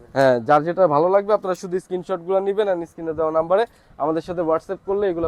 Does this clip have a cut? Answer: no; 0 cuts

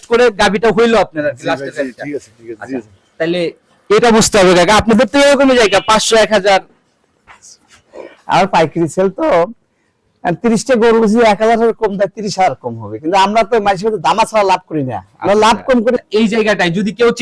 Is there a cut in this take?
yes; 1 cut; at 16.0 s

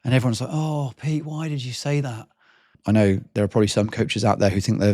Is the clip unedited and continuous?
no; 1 cut; at 2.7 s

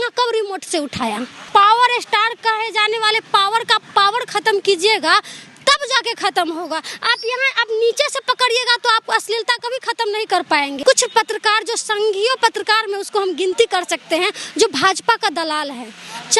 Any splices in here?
yes; 2 cuts; at 1.4 s, 10.8 s

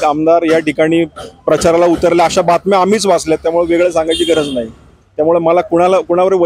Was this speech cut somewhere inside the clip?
yes; 1 cut; at 5.0 s

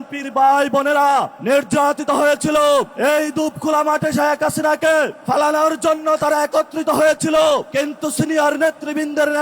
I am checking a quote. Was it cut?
yes; 4 cuts; at 1.2 s, 2.9 s, 5.2 s, 7.7 s

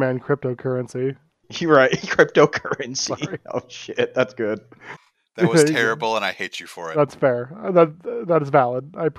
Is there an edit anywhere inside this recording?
yes; 1 cut; at 4.8 s

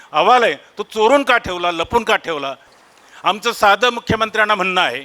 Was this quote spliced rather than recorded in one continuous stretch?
yes; 1 cut; at 2.7 s

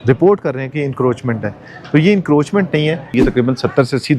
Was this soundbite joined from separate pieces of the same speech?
yes; 1 cut; at 3.1 s

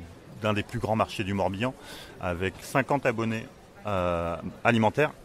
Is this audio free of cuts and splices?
no; 1 cut; at 2.6 s

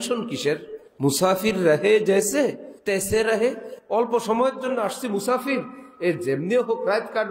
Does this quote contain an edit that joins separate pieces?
yes; 2 cuts; at 2.7 s, 3.7 s

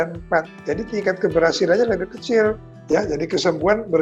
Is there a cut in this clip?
yes; 1 cut; at 2.7 s

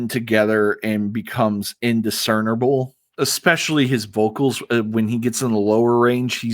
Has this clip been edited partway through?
yes; 1 cut; at 3.0 s

